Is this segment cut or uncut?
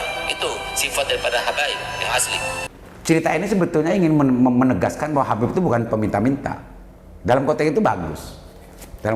cut